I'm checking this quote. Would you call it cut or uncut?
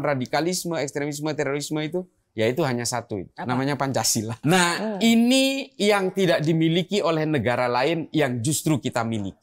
uncut